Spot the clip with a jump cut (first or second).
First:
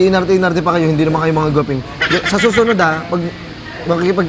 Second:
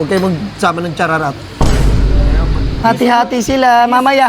second